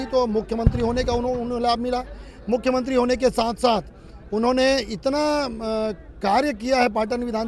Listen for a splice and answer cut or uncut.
uncut